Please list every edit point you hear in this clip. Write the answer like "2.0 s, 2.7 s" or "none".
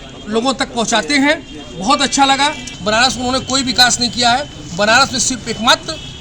2.7 s